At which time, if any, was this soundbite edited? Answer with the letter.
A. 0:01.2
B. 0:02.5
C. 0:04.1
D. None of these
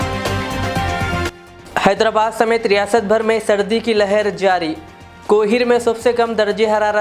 D